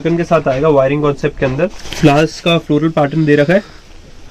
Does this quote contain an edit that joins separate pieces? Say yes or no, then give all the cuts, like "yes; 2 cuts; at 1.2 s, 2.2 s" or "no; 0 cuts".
yes; 1 cut; at 1.8 s